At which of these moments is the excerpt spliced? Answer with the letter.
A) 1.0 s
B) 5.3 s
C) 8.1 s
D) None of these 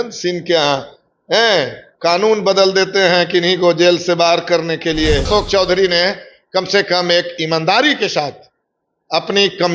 B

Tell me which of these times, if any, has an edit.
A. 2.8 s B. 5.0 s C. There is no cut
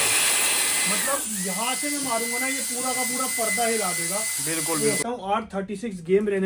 B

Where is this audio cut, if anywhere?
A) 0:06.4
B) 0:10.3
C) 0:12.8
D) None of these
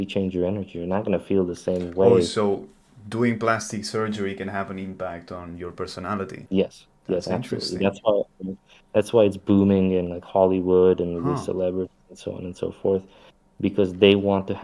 A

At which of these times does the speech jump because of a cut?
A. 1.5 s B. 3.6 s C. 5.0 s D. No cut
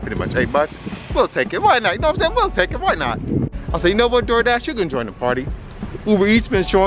B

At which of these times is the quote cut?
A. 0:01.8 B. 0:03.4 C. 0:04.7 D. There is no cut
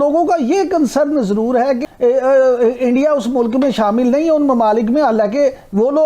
A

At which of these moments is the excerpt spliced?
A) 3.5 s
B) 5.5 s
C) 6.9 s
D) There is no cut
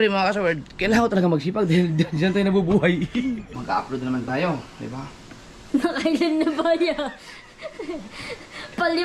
A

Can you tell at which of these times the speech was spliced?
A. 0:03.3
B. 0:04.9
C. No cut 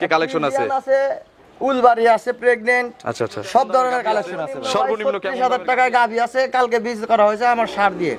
B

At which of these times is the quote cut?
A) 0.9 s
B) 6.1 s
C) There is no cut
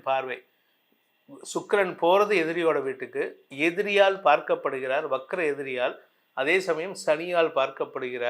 C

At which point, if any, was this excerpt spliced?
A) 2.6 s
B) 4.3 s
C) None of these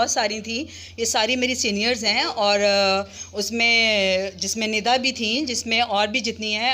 C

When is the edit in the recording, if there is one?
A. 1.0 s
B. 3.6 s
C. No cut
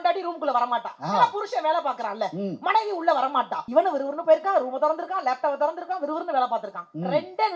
B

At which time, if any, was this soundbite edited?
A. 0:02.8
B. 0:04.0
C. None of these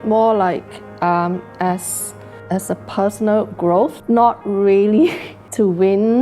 B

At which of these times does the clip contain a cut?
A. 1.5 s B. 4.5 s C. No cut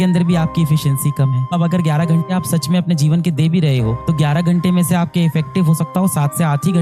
A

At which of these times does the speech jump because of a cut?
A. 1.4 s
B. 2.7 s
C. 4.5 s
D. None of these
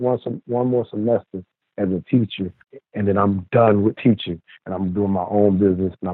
B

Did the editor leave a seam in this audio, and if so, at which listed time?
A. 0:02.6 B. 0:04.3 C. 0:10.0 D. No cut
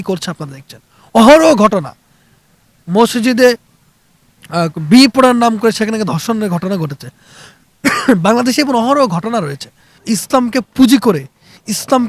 C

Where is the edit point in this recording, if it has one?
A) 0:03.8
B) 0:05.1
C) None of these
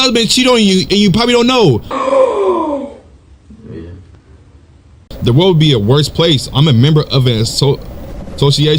B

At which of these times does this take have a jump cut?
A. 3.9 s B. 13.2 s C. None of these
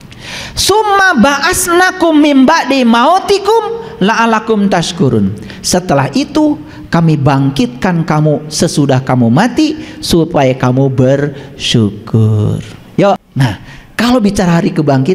B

